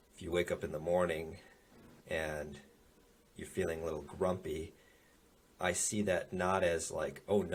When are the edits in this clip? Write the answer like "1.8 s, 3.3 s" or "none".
none